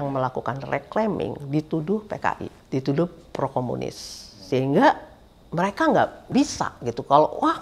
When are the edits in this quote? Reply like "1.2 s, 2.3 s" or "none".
2.5 s, 6.3 s